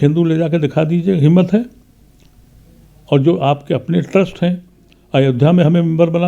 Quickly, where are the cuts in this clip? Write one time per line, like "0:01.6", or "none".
none